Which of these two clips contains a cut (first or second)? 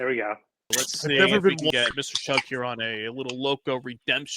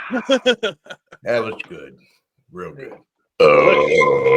first